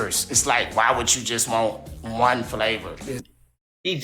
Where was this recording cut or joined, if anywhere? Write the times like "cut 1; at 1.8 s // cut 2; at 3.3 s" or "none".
none